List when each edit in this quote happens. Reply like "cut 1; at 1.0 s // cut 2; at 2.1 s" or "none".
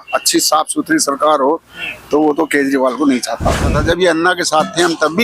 cut 1; at 3.7 s